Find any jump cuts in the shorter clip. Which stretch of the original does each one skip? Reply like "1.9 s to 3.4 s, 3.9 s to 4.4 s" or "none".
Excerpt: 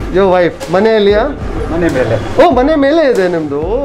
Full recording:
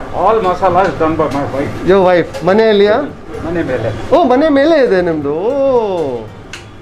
none